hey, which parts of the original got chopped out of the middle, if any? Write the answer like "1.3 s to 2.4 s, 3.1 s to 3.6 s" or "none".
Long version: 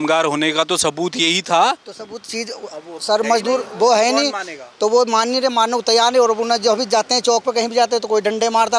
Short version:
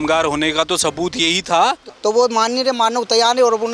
1.9 s to 4.6 s